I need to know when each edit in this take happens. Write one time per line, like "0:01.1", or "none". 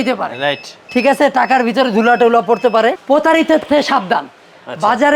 0:03.0